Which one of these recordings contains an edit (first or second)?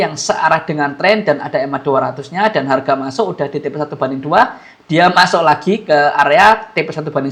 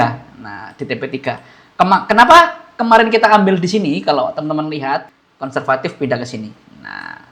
second